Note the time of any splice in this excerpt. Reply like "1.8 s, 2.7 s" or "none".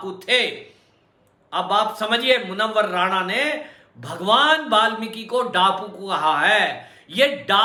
none